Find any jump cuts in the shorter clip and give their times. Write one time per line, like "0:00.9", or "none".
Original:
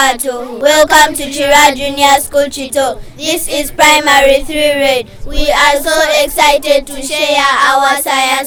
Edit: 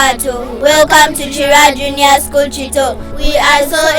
0:03.1